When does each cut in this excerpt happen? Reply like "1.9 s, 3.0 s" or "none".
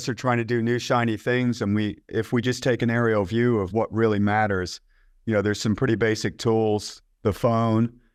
none

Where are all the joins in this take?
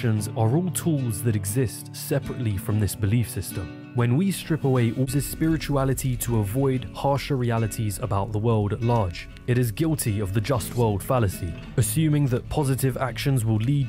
5.1 s

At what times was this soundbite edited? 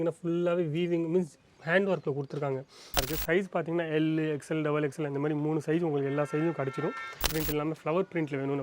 3.0 s, 7.4 s

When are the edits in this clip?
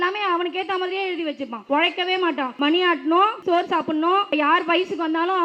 1.5 s, 2.5 s, 3.4 s, 4.3 s

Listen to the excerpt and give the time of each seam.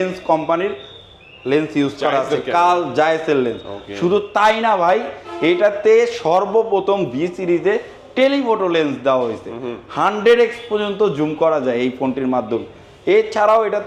none

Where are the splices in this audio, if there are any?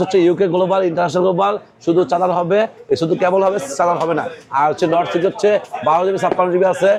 none

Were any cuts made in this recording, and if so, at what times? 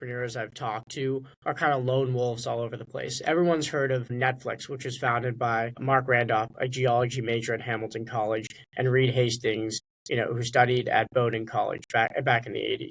4.1 s, 5.8 s

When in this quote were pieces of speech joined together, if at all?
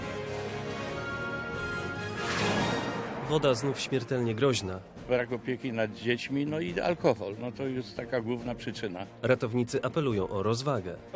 1.4 s

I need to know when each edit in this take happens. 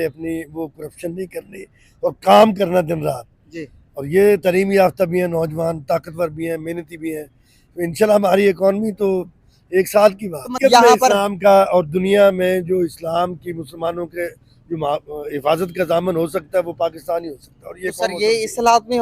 10.5 s

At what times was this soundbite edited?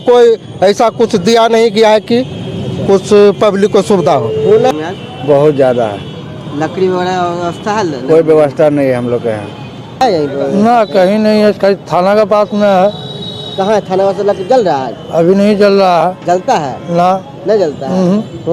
4.7 s, 10.0 s

